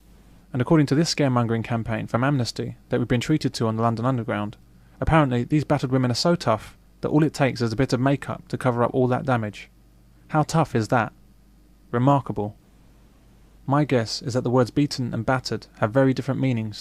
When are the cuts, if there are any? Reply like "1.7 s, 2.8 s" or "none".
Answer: 5.4 s

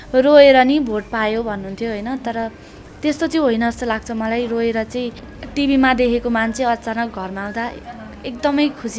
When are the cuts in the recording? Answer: 5.3 s

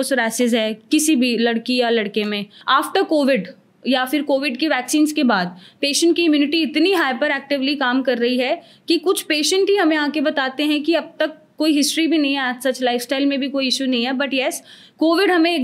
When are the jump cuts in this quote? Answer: 2.5 s

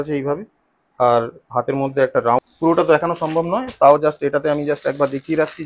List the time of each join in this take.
2.5 s

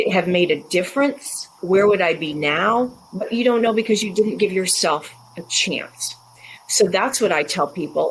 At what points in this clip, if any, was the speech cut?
1.6 s

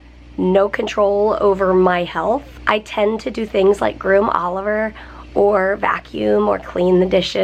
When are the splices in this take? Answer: 2.5 s

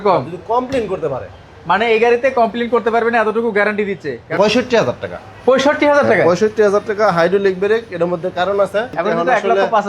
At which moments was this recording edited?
4.3 s, 8.9 s

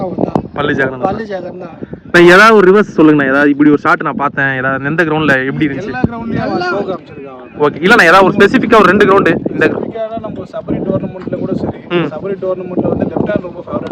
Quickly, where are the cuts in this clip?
none

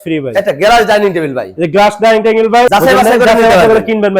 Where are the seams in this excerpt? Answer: 2.7 s

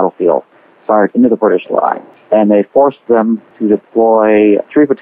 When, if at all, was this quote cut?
2.1 s, 3.5 s

